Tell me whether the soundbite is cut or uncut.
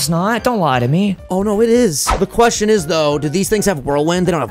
cut